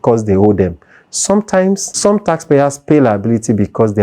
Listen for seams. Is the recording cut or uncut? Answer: cut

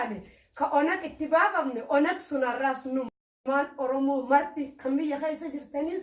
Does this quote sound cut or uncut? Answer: cut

